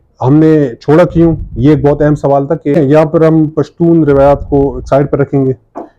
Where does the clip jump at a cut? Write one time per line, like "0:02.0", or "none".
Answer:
0:02.7